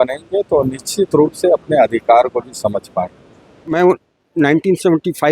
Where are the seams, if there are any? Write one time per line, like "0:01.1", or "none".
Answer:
0:03.6